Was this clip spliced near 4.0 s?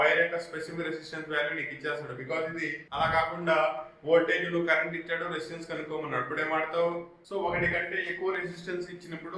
no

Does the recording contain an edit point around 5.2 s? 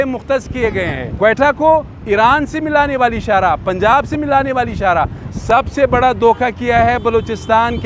yes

